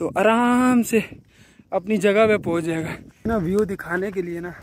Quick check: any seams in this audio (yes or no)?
yes